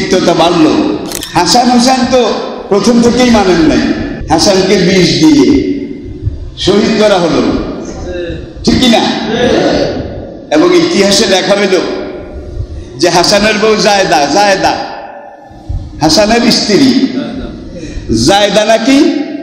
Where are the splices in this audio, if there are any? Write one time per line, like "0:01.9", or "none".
0:01.1
0:04.1